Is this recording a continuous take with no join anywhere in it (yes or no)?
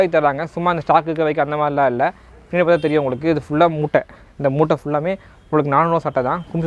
yes